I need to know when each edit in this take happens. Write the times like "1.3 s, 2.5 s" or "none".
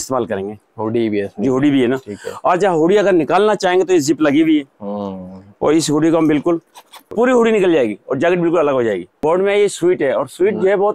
7.1 s, 9.2 s